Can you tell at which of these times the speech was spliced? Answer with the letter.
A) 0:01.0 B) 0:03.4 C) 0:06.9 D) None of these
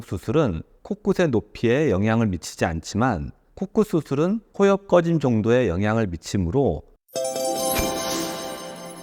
C